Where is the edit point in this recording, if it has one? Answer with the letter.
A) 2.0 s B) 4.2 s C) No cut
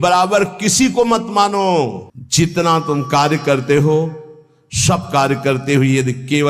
A